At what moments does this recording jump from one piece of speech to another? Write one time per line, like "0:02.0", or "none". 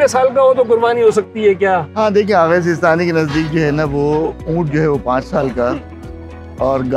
none